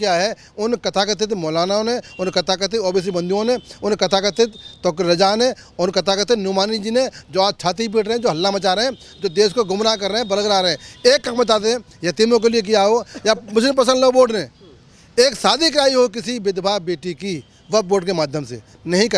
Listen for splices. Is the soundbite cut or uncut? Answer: uncut